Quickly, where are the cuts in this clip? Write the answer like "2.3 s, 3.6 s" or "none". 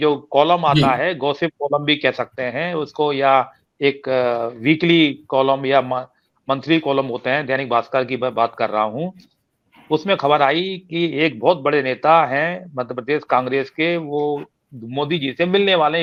none